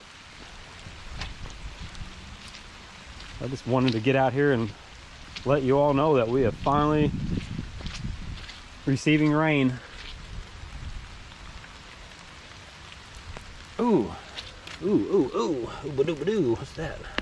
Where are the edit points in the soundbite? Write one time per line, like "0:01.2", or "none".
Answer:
none